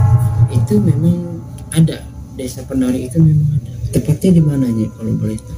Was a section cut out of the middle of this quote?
yes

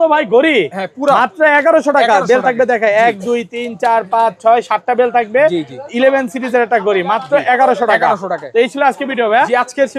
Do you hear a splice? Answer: no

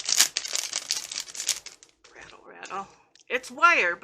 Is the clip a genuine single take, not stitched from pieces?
no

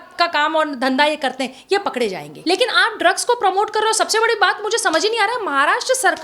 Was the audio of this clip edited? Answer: yes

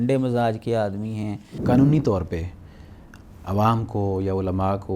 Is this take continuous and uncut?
no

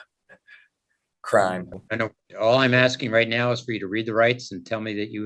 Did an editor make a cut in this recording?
no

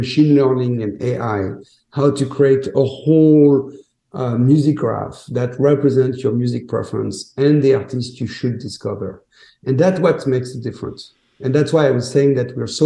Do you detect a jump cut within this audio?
no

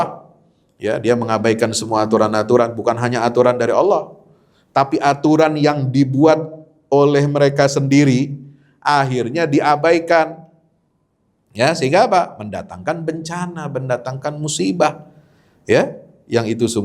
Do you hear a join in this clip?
no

